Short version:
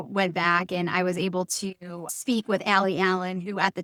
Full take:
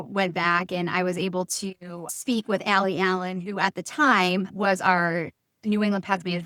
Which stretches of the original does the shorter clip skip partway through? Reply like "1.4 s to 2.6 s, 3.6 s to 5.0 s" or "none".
none